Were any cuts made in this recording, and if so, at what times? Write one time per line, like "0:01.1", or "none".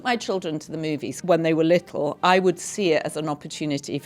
0:01.2